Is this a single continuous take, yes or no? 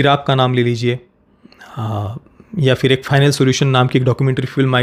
yes